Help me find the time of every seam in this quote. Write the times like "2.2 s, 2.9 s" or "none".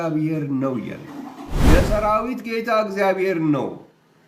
1.4 s